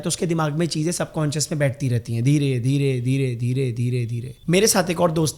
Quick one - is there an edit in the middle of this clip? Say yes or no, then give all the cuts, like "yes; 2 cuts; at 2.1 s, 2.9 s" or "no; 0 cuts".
yes; 1 cut; at 4.2 s